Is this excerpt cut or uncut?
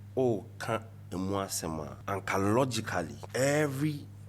cut